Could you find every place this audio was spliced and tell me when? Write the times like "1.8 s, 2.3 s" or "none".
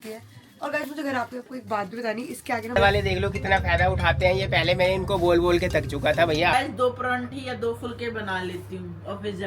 2.8 s, 6.5 s